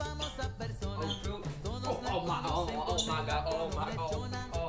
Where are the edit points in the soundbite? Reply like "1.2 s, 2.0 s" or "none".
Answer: none